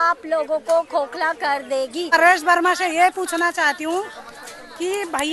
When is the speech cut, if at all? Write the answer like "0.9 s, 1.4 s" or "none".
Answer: 2.1 s